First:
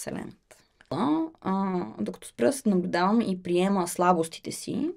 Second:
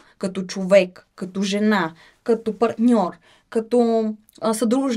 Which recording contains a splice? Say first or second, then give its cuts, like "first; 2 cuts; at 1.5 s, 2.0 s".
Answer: first; 1 cut; at 0.9 s